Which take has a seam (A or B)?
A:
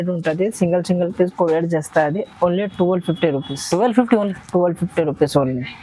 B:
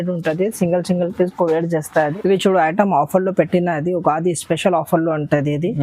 B